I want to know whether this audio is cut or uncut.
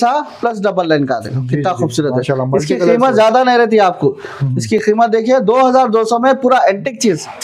uncut